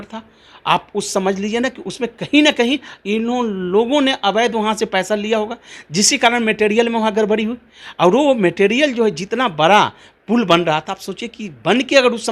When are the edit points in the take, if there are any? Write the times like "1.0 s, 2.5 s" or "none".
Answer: none